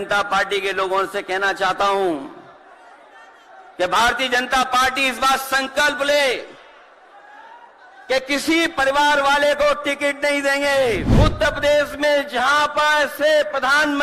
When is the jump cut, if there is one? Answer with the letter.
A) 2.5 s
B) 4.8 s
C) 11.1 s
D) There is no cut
C